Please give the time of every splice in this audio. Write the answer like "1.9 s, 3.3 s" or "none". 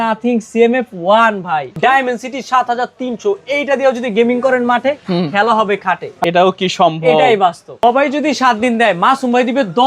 1.8 s, 6.2 s, 7.7 s

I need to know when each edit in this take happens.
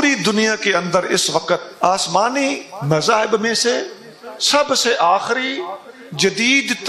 1.7 s

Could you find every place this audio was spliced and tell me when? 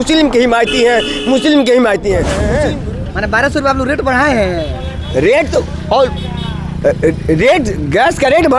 2.5 s

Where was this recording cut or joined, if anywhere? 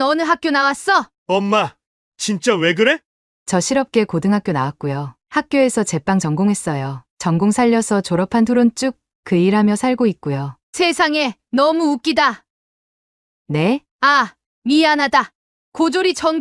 1.1 s

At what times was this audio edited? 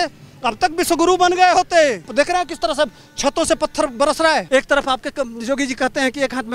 2.1 s, 4.5 s

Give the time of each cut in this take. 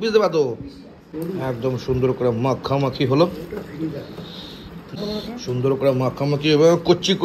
none

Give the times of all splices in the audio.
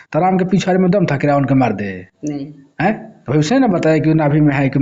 none

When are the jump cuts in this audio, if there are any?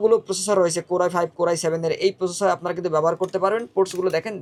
none

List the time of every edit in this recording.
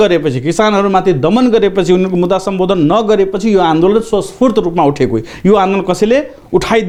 none

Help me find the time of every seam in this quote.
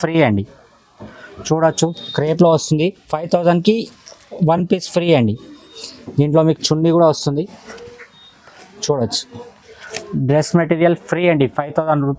none

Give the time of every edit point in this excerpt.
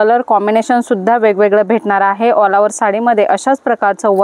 none

